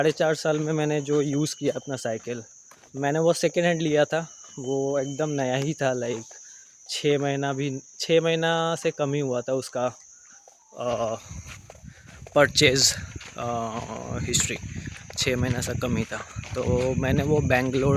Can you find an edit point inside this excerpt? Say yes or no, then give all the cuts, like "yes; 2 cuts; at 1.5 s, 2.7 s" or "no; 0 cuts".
no; 0 cuts